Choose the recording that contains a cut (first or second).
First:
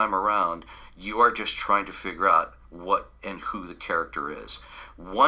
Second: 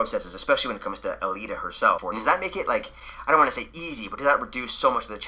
second